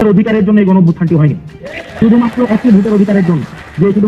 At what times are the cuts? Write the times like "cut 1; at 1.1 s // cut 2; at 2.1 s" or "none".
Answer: none